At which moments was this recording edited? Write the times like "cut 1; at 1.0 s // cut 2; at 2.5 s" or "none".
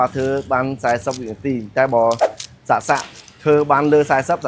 none